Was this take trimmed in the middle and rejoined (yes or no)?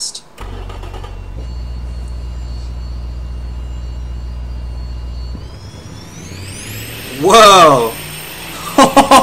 no